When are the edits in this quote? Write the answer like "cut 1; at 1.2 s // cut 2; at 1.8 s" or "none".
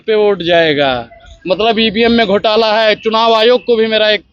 none